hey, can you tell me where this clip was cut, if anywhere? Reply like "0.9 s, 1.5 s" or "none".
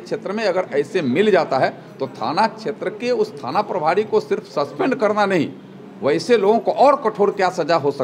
none